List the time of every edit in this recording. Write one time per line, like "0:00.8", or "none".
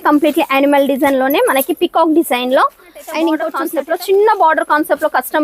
0:03.6